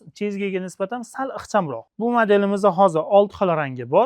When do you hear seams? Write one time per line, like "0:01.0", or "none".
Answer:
0:01.8